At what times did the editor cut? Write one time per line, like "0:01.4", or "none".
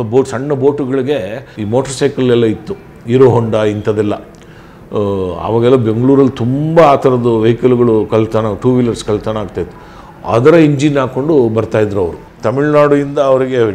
0:01.5
0:12.3